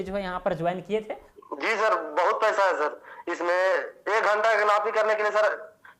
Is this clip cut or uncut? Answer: cut